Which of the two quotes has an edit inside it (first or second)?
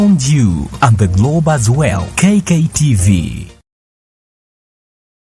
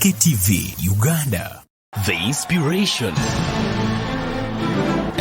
second